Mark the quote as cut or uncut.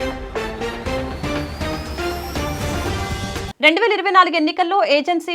cut